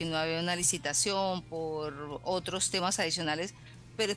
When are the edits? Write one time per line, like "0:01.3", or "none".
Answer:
none